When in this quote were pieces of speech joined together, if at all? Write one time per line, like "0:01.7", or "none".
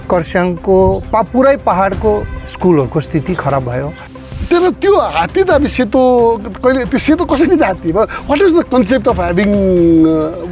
0:04.3